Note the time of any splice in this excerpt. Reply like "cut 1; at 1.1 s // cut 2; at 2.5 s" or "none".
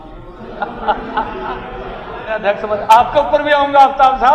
cut 1; at 2.4 s